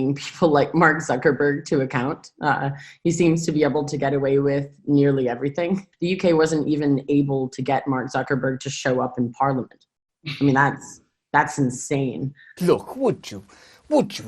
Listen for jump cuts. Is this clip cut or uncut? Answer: cut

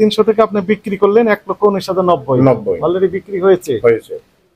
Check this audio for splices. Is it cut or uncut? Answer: uncut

